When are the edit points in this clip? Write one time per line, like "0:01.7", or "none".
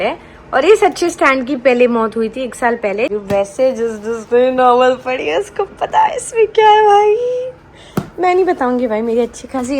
0:03.1